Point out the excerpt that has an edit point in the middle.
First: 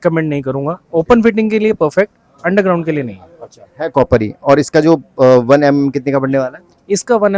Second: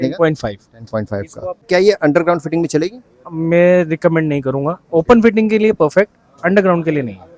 second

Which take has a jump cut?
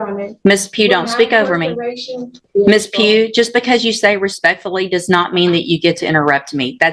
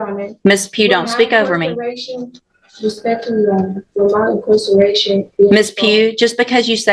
first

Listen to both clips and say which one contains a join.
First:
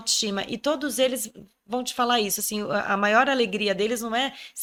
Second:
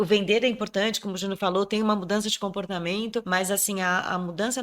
second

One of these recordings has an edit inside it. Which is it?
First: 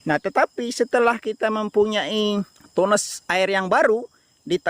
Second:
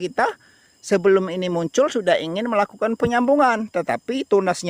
first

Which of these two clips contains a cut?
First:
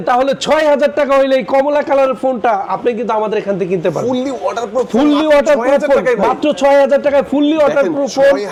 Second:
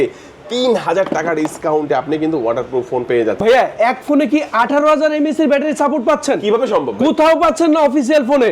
second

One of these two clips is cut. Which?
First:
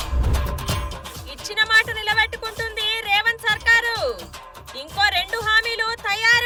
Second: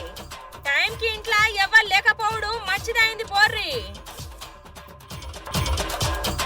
second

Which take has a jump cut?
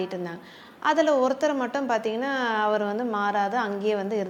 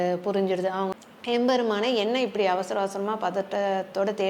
second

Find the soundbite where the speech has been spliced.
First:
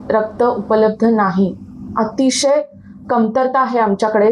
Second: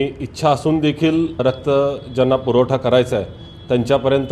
second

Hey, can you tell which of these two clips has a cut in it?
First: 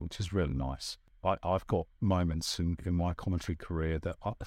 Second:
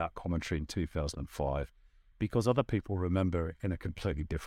first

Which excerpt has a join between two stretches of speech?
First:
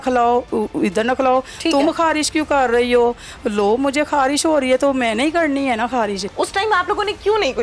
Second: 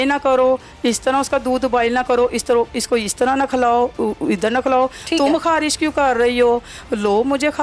first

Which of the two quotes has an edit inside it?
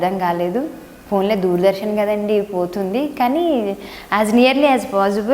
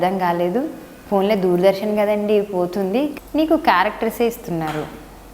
second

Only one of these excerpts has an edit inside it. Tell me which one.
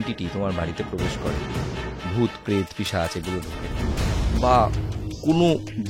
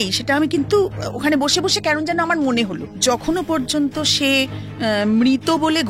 second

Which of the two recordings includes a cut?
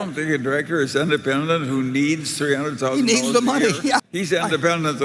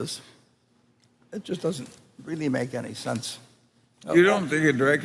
first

